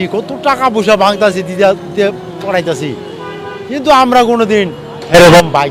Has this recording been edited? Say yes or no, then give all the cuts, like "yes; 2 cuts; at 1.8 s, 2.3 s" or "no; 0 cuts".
no; 0 cuts